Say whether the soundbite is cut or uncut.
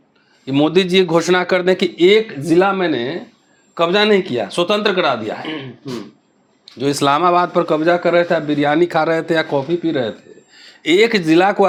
uncut